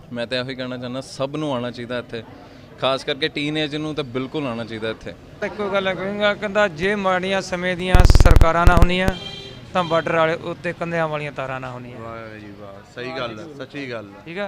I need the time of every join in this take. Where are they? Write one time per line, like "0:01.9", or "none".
0:05.3